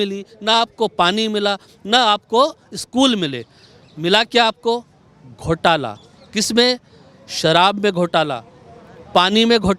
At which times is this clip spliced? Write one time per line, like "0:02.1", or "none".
none